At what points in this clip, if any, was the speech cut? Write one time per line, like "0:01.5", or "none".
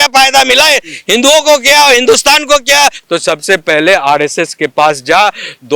0:03.0